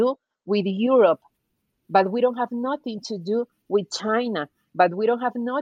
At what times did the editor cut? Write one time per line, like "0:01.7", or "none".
none

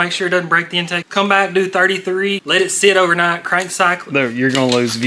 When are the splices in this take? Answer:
0:01.0
0:02.4

